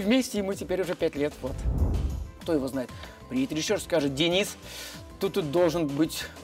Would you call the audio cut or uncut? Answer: cut